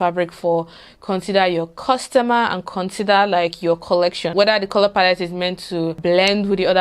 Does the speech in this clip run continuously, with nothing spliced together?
no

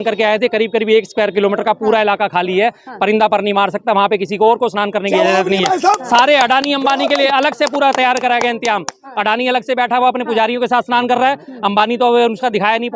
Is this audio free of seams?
yes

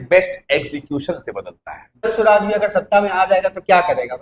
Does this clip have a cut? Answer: yes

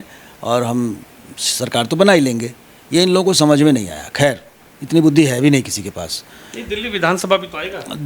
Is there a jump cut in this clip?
no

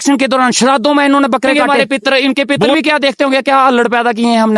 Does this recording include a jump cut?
yes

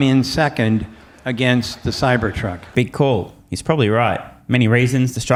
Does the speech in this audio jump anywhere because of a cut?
no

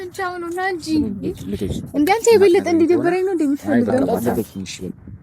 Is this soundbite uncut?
no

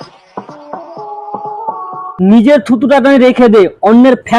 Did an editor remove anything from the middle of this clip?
yes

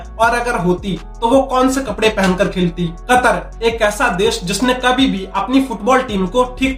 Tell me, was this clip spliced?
no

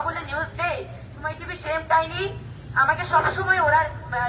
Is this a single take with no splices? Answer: yes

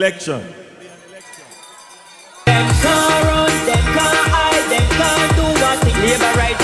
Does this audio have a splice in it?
yes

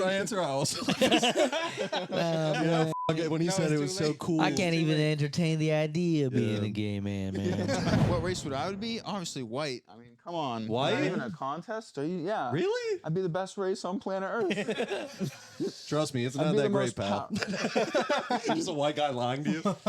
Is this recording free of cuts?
no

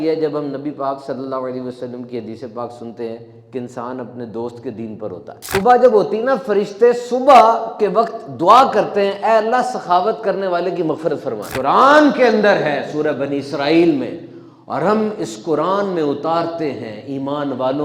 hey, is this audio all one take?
no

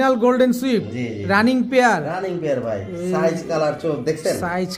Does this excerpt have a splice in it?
no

